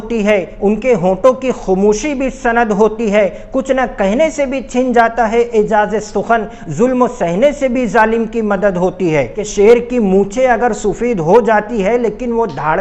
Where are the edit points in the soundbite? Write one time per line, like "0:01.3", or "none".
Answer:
0:09.4